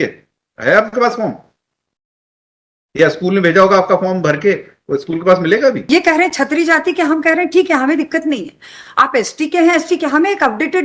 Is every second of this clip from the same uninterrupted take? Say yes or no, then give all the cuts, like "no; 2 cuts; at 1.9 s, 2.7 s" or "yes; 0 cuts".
no; 1 cut; at 5.9 s